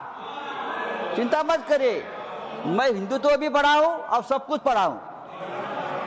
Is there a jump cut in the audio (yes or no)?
no